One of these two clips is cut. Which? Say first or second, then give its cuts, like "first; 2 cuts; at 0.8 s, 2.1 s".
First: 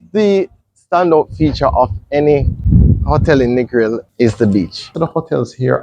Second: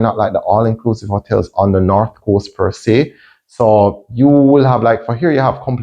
first; 3 cuts; at 2.6 s, 4.1 s, 4.9 s